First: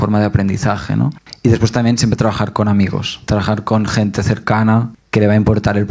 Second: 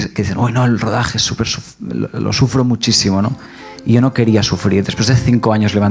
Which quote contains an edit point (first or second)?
first